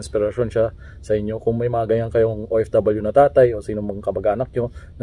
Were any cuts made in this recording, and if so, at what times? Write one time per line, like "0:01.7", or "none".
none